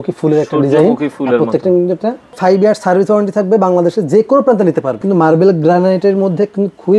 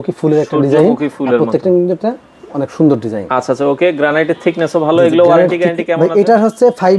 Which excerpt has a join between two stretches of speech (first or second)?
first